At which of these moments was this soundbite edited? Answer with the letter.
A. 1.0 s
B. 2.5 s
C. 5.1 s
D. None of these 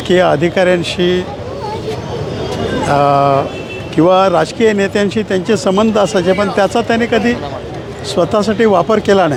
D